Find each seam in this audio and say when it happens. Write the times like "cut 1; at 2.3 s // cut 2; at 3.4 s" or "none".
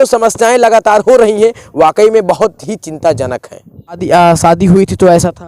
cut 1; at 4.0 s